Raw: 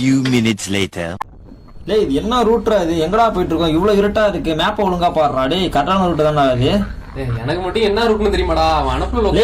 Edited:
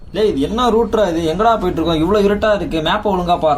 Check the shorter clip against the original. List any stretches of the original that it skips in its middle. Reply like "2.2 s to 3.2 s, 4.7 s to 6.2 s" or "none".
none